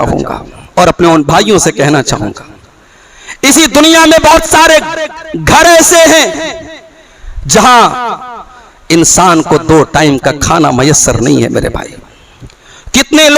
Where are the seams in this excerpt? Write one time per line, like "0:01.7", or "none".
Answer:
none